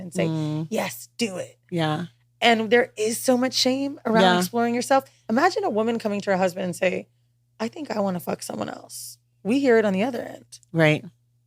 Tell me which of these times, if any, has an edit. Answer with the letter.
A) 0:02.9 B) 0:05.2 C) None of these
B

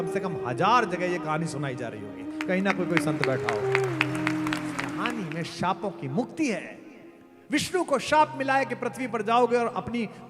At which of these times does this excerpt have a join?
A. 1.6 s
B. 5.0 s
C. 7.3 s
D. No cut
B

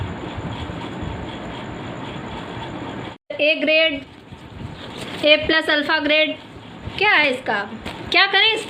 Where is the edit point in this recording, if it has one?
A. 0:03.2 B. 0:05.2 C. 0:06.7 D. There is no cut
A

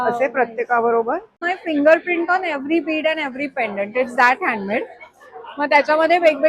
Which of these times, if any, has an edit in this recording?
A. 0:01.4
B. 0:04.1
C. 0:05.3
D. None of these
A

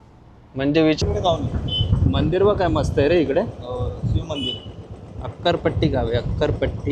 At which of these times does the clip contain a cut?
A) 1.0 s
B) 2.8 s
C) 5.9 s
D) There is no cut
A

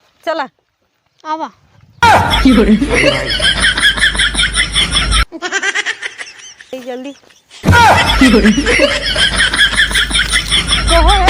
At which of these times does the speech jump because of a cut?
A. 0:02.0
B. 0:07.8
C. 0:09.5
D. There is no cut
A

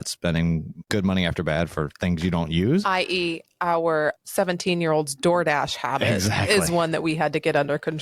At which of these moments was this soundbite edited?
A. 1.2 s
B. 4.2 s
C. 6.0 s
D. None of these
B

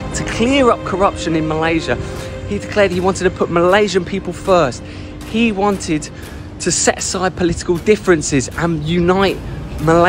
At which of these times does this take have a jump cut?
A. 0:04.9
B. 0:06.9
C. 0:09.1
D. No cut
D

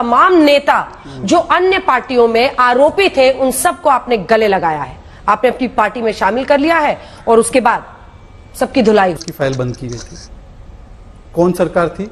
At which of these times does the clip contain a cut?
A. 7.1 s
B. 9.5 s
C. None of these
C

